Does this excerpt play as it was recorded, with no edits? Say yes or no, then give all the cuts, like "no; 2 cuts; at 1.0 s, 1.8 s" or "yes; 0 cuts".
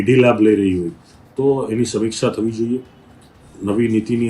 yes; 0 cuts